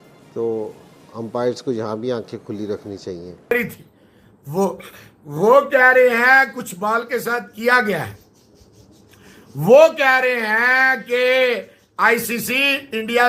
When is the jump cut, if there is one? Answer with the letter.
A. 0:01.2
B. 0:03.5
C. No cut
B